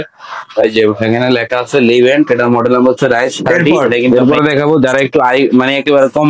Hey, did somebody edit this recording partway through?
yes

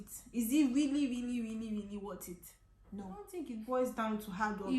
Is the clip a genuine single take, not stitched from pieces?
no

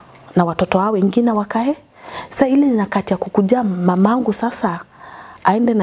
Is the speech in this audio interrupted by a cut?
no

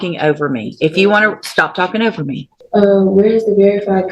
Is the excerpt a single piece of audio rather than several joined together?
no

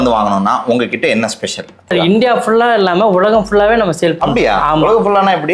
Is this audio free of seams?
no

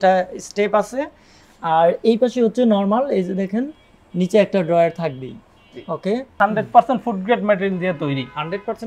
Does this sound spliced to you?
yes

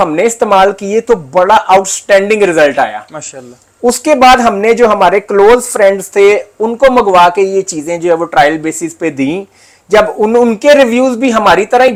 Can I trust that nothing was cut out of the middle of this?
yes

